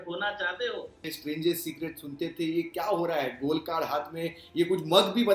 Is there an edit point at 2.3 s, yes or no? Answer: no